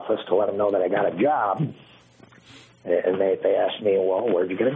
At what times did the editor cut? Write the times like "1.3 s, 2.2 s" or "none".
none